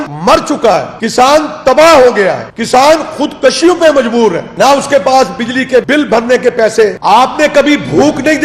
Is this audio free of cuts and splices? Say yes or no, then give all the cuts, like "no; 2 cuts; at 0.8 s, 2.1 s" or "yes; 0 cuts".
yes; 0 cuts